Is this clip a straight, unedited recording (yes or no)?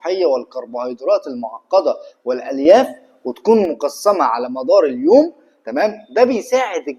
yes